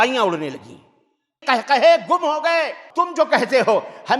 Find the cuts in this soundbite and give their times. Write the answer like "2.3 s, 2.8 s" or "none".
1.4 s, 2.8 s